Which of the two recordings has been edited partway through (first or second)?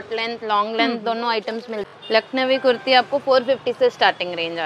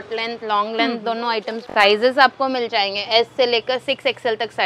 second